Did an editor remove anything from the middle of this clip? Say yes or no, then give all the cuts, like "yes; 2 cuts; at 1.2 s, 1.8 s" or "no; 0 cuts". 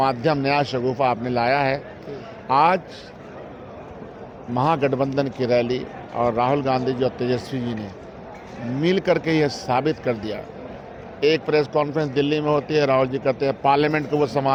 no; 0 cuts